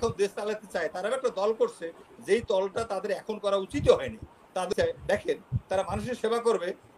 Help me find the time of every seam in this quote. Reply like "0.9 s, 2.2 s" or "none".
4.7 s